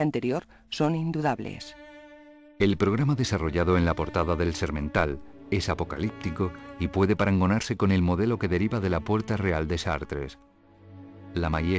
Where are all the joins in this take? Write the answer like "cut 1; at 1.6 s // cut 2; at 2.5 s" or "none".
cut 1; at 4.4 s